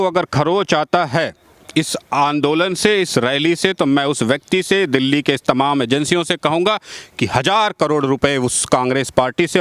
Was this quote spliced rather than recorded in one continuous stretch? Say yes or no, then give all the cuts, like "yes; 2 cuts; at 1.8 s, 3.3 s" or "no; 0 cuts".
no; 0 cuts